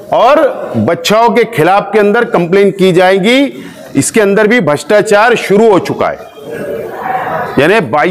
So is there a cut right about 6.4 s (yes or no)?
yes